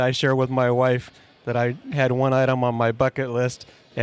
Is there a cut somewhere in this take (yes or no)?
no